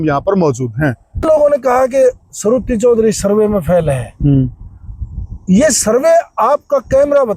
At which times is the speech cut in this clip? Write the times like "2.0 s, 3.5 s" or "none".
1.2 s